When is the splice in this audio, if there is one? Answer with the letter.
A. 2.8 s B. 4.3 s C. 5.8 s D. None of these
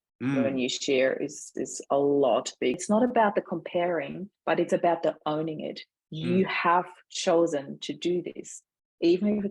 A